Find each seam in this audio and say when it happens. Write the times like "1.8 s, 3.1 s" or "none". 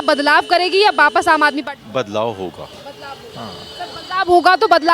none